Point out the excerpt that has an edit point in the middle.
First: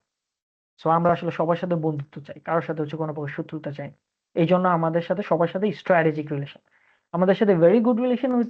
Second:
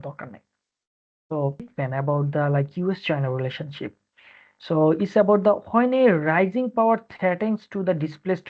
second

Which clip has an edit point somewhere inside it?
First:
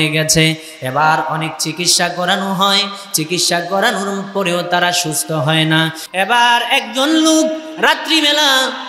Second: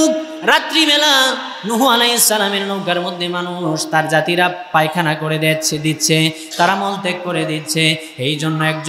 first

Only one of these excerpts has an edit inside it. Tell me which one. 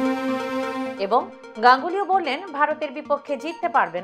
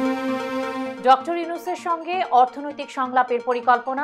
second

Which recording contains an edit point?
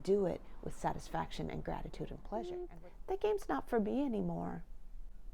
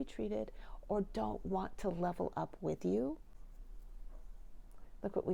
first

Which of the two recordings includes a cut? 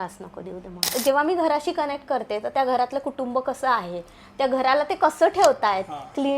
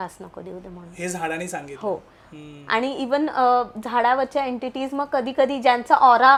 first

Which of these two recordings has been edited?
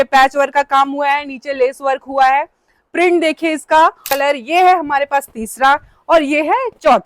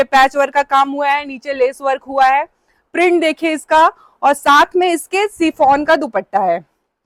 first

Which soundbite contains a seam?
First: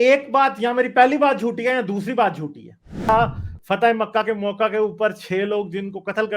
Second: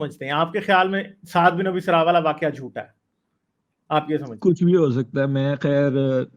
first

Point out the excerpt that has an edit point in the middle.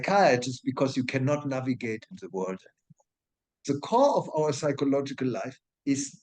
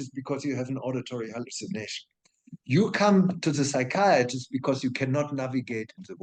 first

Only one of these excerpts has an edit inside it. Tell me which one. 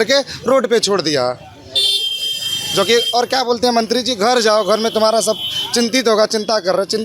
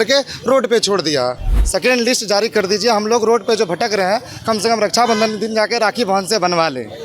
second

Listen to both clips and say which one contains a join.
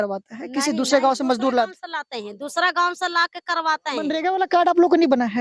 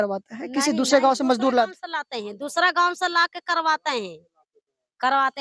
first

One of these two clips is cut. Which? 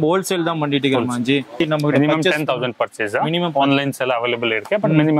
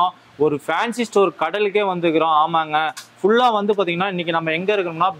first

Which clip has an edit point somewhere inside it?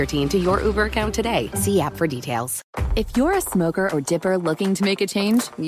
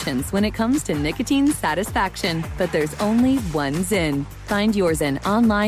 first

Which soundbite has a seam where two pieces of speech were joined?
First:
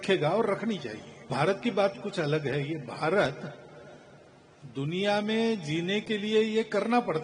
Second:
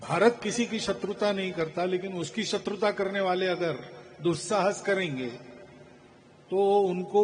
first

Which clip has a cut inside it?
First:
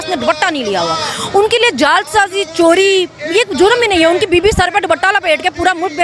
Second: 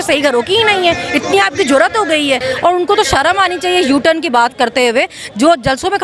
second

